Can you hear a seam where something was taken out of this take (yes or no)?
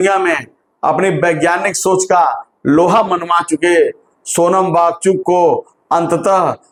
no